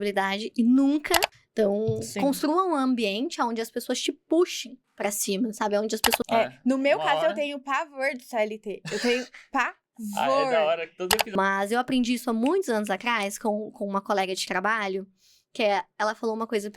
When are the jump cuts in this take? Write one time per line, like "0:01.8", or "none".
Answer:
0:01.4
0:06.2
0:11.3